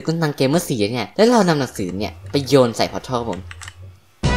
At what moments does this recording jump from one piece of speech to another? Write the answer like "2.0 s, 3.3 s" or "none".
1.0 s